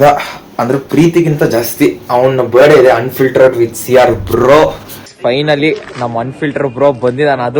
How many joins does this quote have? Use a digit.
1